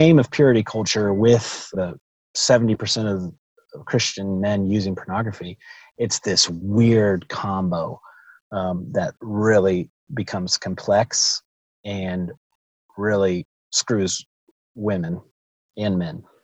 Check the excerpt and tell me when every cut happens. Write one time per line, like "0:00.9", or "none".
0:01.7
0:12.7